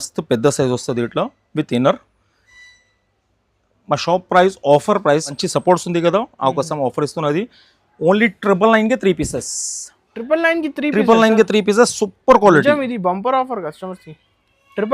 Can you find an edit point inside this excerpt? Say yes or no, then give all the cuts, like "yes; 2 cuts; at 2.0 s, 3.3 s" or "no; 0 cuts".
yes; 1 cut; at 5.4 s